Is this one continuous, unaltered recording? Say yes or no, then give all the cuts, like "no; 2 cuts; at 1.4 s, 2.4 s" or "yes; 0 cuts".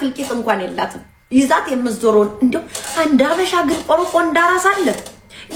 yes; 0 cuts